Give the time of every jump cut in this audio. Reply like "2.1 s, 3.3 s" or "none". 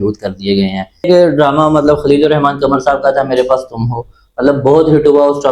1.1 s